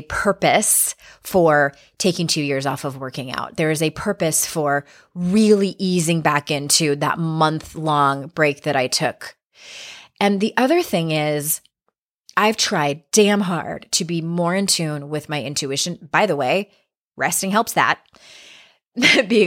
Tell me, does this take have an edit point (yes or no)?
no